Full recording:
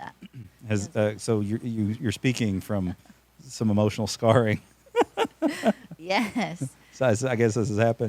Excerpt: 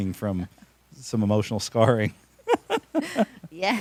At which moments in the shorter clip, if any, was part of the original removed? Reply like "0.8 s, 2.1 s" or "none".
none